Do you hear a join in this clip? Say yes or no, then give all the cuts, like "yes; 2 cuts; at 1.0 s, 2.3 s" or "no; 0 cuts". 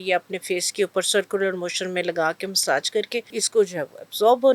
yes; 1 cut; at 3.3 s